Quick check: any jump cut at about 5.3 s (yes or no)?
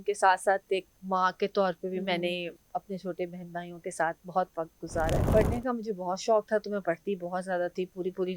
yes